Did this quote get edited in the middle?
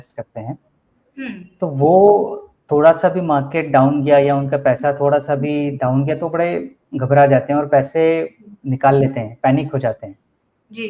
no; 0 cuts

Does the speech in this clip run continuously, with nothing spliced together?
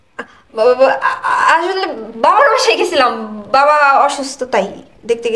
yes; 0 cuts

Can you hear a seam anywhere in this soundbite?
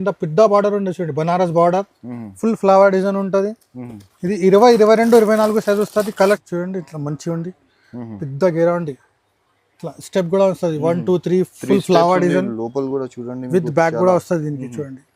yes; 1 cut; at 6.1 s

